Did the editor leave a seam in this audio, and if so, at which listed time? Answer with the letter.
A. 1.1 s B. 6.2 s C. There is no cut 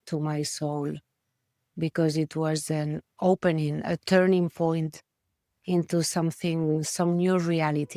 C